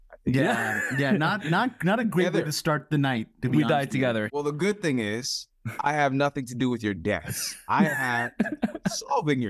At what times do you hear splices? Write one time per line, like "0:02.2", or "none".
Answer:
0:04.3

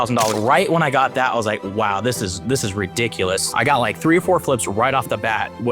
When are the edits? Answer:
0:03.5

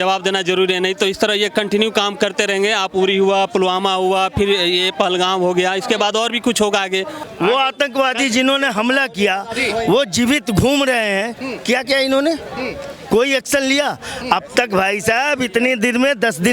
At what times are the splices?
0:07.2

